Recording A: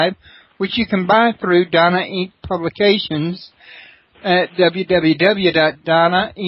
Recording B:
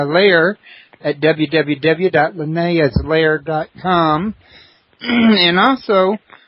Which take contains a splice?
B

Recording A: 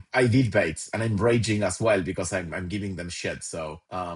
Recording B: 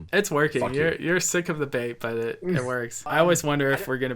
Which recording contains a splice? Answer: B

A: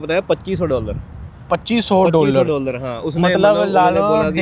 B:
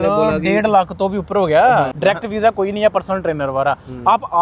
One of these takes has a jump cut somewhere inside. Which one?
B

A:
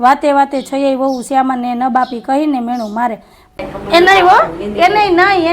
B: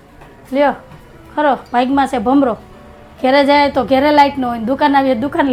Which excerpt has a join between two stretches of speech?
A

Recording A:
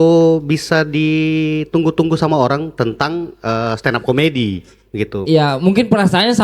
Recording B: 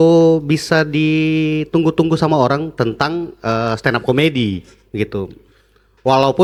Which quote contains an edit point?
A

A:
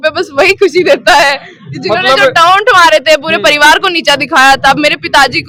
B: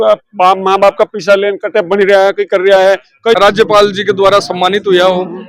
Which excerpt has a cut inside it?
B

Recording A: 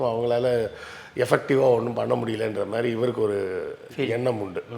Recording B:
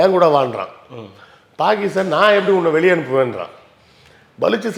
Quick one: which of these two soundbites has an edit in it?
A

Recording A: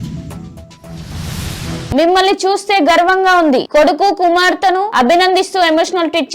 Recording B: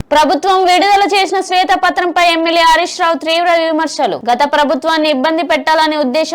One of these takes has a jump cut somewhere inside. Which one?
A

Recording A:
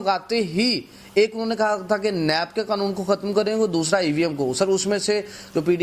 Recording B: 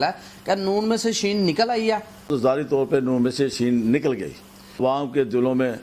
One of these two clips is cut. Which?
B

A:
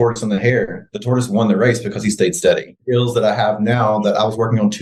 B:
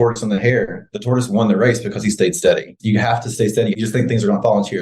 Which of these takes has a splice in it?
B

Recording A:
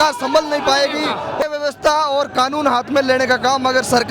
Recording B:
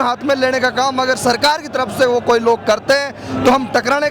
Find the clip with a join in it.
A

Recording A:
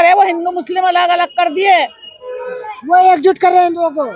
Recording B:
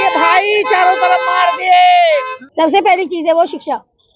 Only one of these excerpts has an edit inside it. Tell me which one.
B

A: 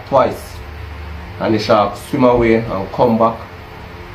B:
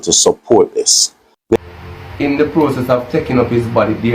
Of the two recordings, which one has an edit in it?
B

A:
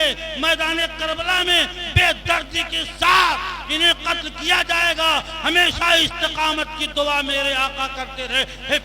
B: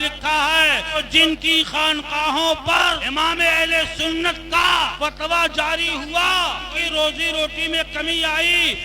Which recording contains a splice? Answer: B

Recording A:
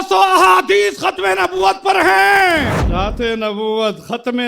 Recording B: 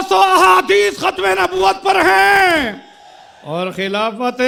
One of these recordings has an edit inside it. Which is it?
A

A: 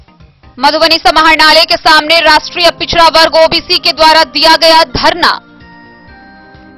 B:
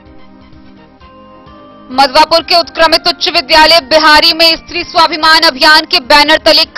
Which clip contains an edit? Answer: B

